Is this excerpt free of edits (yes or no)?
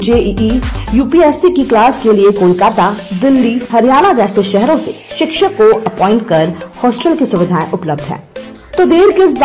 yes